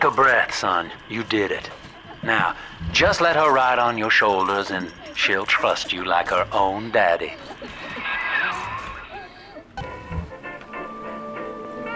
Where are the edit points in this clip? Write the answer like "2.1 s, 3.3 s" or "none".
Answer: 9.8 s